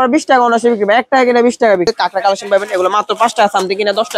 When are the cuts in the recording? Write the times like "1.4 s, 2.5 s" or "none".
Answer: 1.9 s